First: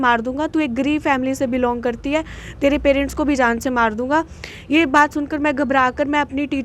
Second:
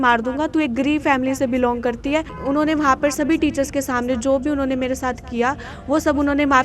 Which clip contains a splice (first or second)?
second